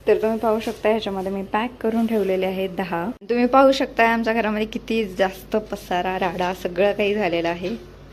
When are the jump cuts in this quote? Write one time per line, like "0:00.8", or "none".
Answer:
0:03.2